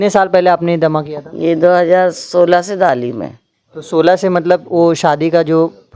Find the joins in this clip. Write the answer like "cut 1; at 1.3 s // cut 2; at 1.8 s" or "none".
none